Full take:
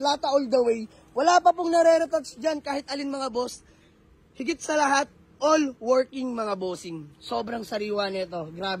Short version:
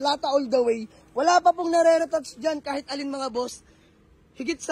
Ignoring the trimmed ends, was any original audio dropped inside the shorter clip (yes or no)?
no